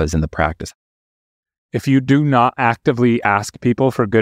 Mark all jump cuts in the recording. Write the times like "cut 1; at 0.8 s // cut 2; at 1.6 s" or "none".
cut 1; at 1.0 s

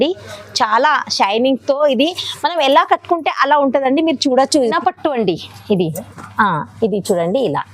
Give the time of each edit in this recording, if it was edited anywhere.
cut 1; at 4.7 s

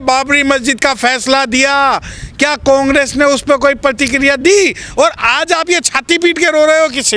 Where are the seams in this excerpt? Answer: none

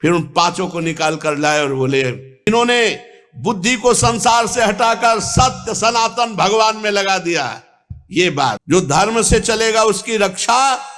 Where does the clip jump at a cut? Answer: cut 1; at 2.3 s // cut 2; at 8.5 s

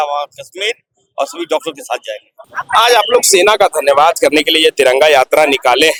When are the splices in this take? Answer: none

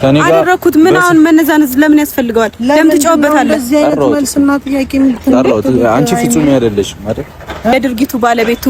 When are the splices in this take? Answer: cut 1; at 7.7 s

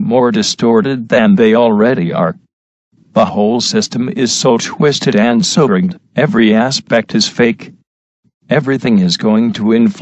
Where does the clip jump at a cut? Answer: cut 1; at 7.6 s

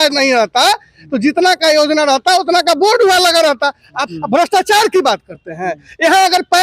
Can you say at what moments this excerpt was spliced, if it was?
cut 1; at 4.0 s

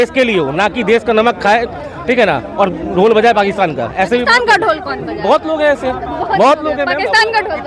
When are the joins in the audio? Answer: none

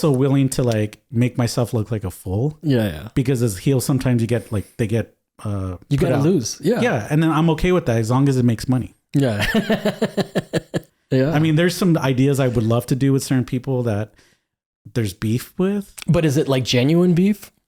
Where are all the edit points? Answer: cut 1; at 10.8 s // cut 2; at 15.9 s

